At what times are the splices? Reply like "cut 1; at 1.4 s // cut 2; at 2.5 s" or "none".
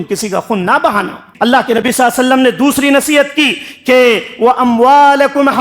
cut 1; at 1.3 s

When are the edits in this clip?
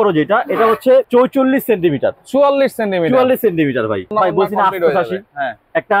cut 1; at 1.1 s // cut 2; at 4.1 s

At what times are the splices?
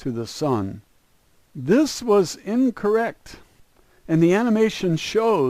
cut 1; at 1.3 s

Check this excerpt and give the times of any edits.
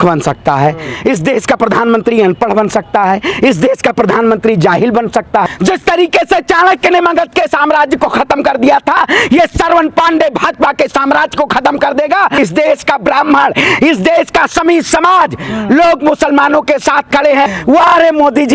cut 1; at 5.4 s // cut 2; at 12.4 s // cut 3; at 17.5 s

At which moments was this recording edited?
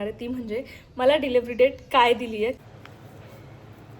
cut 1; at 2.6 s

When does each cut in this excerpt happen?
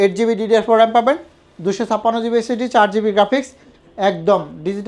none

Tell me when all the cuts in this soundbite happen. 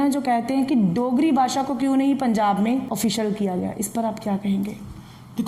cut 1; at 2.9 s

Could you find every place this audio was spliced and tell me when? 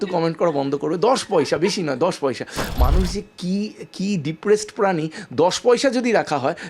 none

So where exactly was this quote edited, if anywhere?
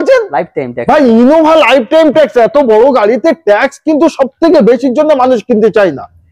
none

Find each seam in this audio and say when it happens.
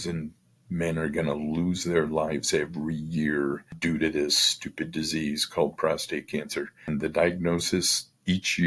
cut 1; at 3.7 s // cut 2; at 6.9 s

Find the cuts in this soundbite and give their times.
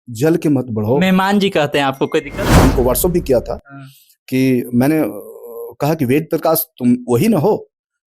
cut 1; at 2.5 s

